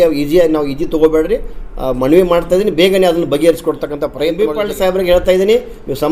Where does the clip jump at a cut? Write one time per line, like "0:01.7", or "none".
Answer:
0:04.2